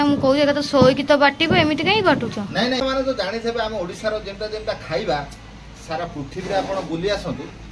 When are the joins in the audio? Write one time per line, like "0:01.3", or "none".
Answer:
0:02.8